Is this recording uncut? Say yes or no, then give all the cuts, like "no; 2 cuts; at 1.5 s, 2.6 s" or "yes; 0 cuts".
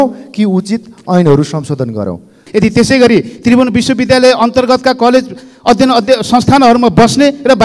no; 1 cut; at 2.4 s